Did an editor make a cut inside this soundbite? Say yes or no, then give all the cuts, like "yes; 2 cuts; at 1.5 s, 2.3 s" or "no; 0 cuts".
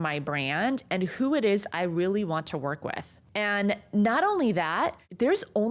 no; 0 cuts